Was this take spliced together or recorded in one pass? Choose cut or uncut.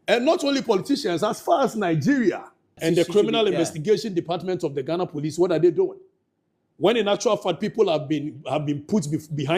cut